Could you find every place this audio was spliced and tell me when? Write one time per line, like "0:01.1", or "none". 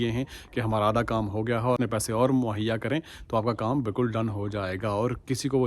0:01.8